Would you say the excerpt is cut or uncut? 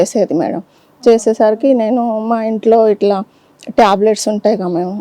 uncut